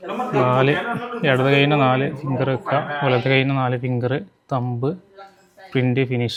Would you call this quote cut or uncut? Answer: uncut